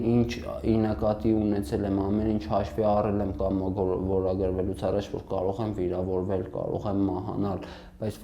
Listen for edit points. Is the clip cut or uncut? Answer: uncut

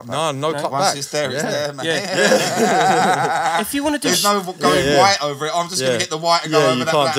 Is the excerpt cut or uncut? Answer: uncut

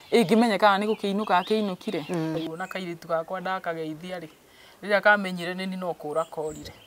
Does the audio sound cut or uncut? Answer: cut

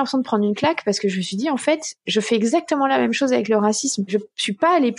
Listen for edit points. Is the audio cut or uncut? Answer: cut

